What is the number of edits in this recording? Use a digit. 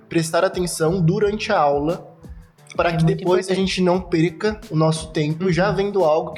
0